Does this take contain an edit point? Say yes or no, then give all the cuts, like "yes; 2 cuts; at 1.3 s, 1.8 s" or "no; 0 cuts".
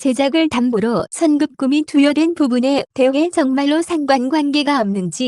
no; 0 cuts